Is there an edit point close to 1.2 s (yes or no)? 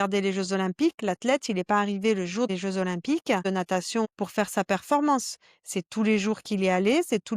no